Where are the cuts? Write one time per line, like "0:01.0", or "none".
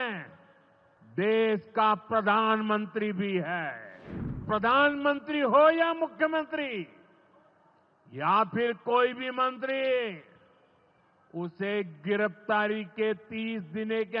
0:04.4